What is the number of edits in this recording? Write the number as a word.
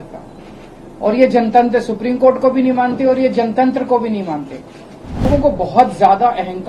one